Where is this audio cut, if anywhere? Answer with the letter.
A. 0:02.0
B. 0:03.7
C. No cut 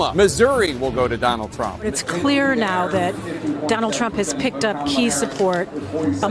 A